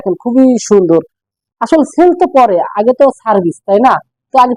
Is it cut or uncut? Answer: uncut